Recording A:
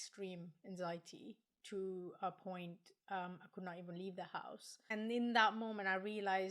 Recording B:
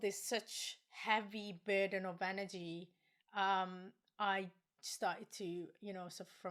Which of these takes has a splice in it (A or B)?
A